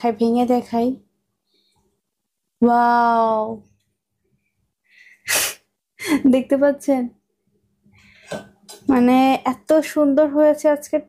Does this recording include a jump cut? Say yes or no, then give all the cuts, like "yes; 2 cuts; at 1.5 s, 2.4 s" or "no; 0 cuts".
no; 0 cuts